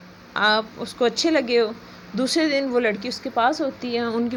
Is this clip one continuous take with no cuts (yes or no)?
yes